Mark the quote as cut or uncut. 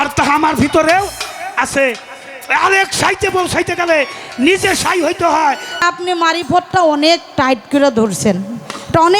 cut